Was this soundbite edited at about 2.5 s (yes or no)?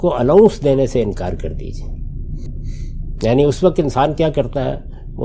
yes